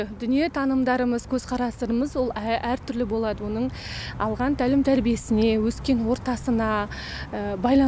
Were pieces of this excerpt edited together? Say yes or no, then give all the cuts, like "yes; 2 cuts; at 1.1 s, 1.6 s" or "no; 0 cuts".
no; 0 cuts